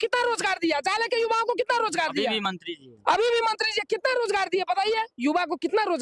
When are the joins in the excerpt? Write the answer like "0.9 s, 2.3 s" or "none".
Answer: none